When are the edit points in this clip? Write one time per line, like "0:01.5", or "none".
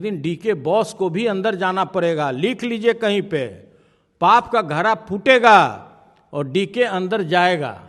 none